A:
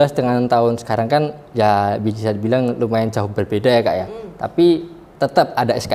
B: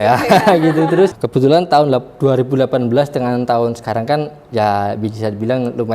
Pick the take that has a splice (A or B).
B